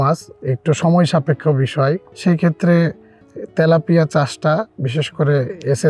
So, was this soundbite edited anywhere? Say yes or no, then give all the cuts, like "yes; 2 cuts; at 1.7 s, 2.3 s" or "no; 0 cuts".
yes; 1 cut; at 2.1 s